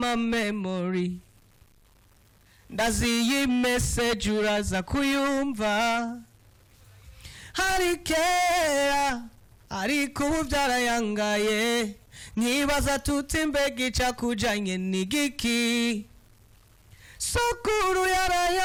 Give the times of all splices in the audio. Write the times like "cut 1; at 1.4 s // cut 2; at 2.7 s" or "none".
none